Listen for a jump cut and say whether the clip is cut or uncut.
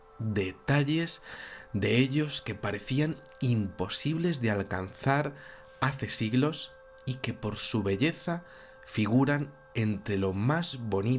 uncut